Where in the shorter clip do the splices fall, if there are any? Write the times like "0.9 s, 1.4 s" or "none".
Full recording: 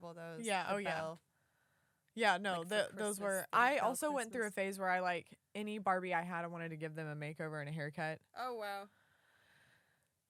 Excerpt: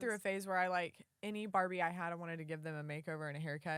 none